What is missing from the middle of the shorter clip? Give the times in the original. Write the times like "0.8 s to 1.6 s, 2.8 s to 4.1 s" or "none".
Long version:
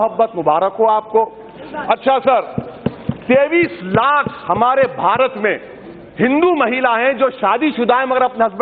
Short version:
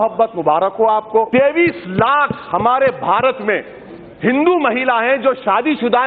1.3 s to 3.2 s